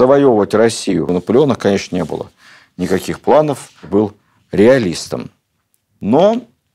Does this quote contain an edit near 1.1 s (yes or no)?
yes